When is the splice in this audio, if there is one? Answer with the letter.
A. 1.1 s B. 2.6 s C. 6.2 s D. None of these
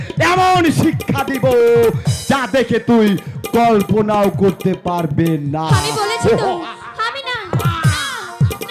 D